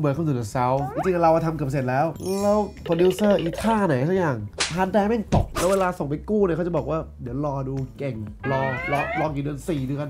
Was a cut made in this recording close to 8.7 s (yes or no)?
no